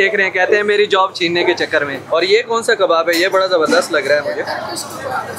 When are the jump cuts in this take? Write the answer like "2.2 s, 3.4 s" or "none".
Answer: 2.0 s